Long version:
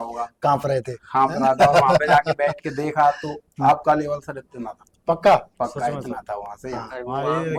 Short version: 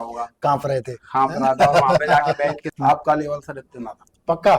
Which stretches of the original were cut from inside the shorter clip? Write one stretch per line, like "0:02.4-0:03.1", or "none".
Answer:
0:02.7-0:03.5